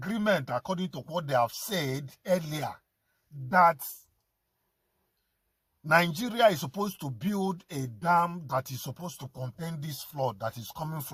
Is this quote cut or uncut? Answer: uncut